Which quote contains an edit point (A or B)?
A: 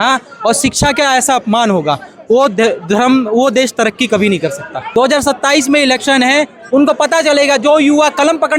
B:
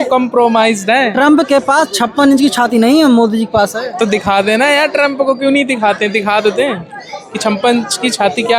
A